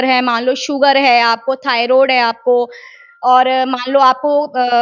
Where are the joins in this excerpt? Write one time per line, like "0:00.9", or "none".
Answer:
none